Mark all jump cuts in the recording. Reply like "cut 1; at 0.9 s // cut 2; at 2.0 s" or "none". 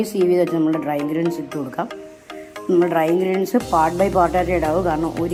none